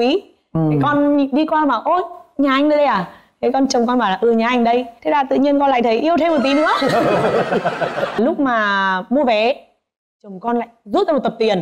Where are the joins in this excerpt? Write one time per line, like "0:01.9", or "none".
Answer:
0:08.2